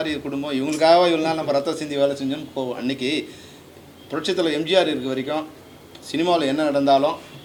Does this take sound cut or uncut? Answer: uncut